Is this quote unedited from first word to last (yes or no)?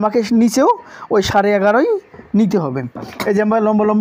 yes